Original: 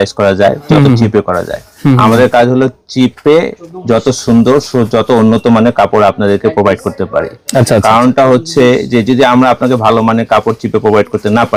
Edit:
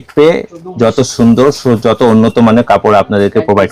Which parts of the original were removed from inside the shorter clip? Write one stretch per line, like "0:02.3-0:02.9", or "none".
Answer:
none